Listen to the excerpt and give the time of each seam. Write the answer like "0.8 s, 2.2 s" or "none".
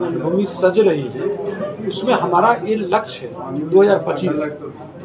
none